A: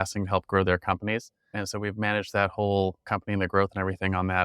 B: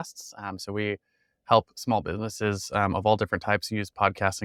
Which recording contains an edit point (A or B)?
A